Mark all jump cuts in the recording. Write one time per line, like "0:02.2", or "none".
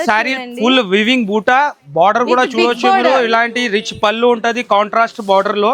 none